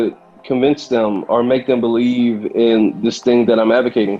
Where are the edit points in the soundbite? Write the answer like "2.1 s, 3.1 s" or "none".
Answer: none